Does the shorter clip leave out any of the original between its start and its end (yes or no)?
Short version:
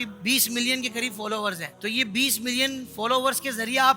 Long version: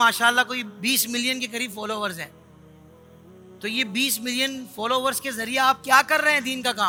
yes